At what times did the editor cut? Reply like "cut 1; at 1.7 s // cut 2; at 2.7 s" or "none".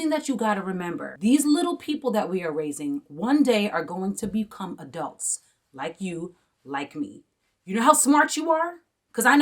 cut 1; at 1.0 s